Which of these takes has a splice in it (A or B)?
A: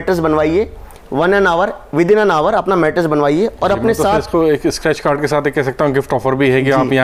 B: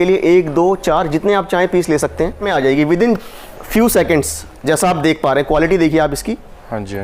B